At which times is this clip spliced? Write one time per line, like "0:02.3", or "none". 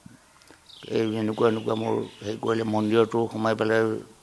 none